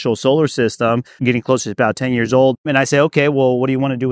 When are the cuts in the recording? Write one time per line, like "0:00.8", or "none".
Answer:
0:01.2
0:02.7